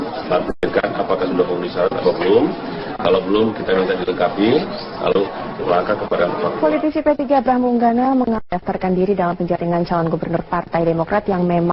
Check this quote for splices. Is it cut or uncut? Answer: uncut